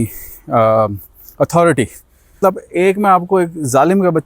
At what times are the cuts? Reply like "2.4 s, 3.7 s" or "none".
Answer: 2.4 s

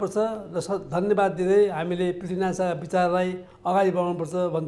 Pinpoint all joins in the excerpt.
none

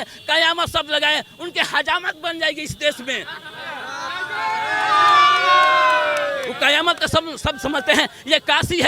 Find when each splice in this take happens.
none

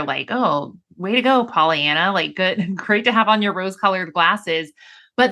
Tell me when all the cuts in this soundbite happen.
none

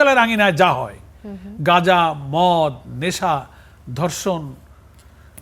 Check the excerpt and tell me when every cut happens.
none

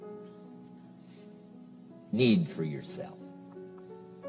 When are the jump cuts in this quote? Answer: none

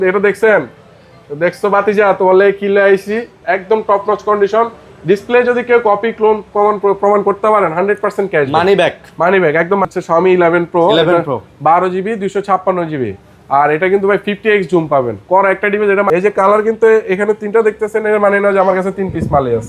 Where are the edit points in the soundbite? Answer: 3.4 s, 9.8 s, 16.1 s

